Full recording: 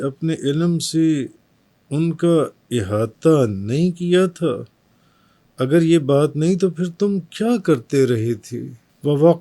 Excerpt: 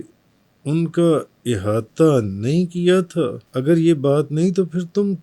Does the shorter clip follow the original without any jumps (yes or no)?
no